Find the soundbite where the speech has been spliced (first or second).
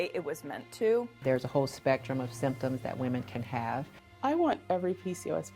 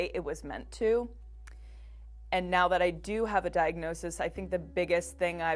first